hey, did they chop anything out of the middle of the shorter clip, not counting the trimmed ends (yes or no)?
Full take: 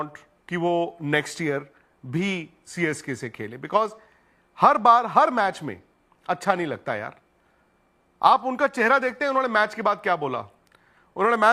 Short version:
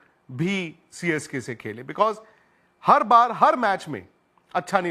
no